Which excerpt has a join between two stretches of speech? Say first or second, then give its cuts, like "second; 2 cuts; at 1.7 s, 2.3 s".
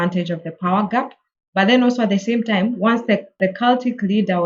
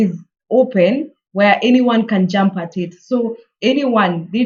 first; 1 cut; at 3.4 s